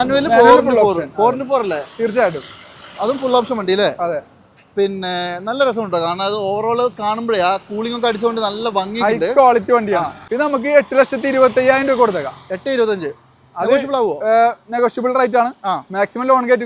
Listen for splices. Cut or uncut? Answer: cut